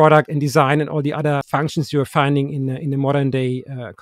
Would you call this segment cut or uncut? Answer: cut